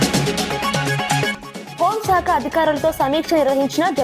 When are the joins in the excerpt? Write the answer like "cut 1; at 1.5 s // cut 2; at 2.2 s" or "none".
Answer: cut 1; at 1.3 s